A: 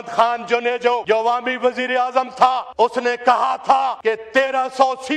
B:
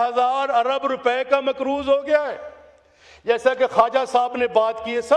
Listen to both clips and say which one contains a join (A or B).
A